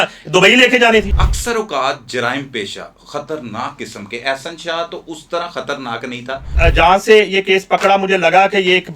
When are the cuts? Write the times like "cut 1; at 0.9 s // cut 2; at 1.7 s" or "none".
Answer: cut 1; at 1.1 s // cut 2; at 6.5 s